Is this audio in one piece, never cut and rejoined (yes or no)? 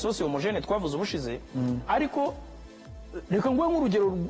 yes